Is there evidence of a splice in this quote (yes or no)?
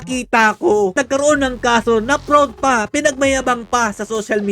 yes